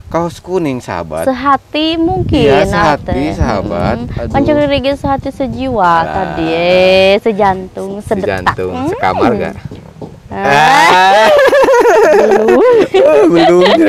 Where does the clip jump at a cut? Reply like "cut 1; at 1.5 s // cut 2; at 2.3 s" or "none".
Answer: none